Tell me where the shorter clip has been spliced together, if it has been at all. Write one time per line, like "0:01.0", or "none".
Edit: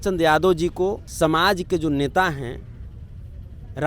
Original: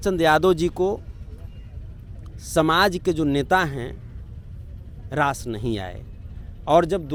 0:01.1

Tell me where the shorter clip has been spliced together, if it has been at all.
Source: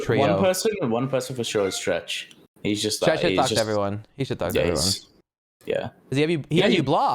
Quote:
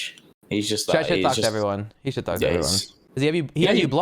0:03.0

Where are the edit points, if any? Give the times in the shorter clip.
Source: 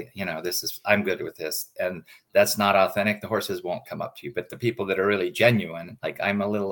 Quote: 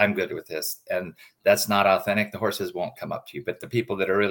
none

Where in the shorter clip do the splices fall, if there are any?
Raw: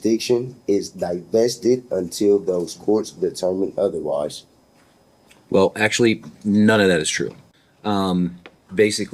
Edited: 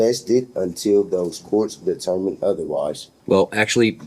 0:03.1

